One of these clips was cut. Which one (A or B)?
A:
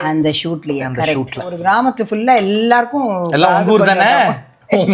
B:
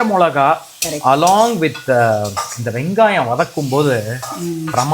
A